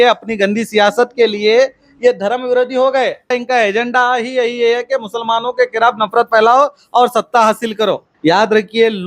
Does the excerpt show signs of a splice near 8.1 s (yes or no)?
yes